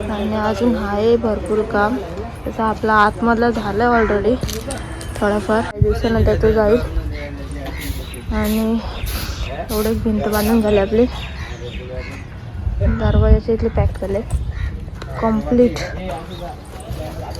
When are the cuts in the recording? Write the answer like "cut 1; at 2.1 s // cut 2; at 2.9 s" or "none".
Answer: cut 1; at 5.8 s